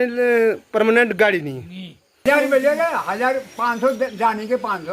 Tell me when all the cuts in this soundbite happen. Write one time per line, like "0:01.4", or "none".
0:02.2